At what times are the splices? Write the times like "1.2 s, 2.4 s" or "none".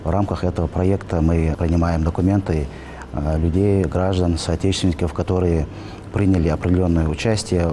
1.5 s